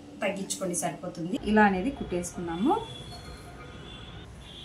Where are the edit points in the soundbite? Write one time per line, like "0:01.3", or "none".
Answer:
0:01.3